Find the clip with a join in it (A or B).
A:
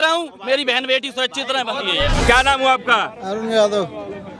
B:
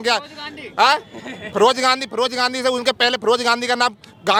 A